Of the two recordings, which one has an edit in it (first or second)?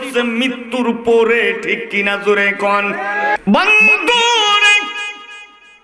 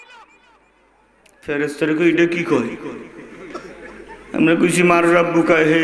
first